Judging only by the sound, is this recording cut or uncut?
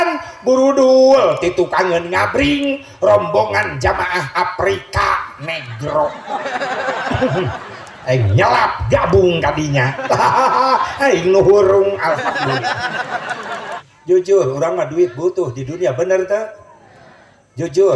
cut